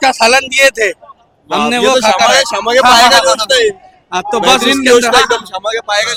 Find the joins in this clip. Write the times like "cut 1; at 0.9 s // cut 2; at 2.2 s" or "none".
none